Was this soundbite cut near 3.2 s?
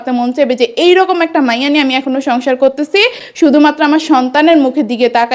no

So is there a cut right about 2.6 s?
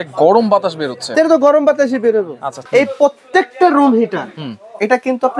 yes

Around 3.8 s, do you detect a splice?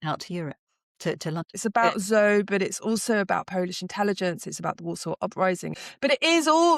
no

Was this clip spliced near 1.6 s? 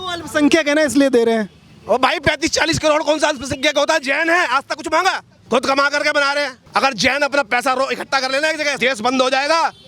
no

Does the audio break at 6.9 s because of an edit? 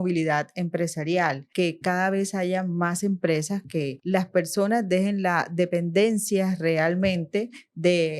no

